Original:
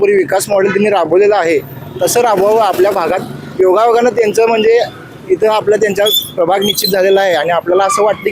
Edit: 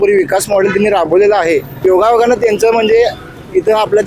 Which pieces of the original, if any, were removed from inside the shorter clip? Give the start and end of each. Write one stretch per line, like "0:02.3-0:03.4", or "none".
0:01.7-0:03.4

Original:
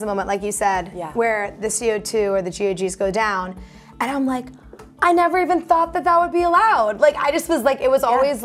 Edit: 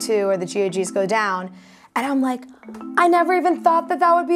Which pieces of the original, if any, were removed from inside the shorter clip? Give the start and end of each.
none

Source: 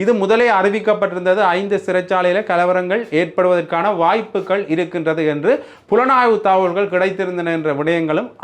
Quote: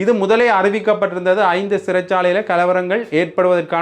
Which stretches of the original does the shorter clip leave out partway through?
none

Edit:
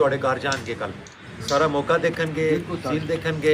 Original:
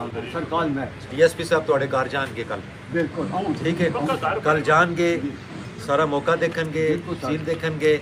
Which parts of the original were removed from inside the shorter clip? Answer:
0:02.8-0:05.5

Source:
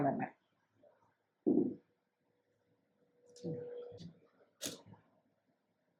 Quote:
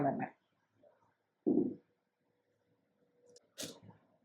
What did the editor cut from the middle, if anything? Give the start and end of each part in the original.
0:03.2-0:04.2

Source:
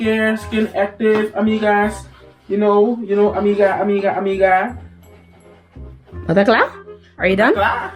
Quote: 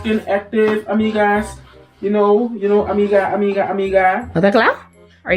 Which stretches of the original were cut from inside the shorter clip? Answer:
0:04.7-0:06.2

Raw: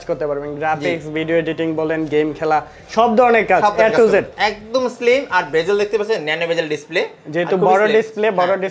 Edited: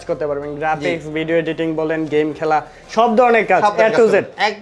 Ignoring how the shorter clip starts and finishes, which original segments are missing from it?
none

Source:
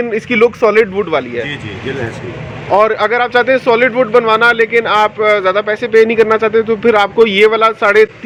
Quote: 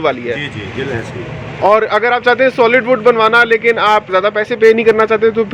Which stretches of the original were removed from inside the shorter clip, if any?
0:05.2-0:05.4

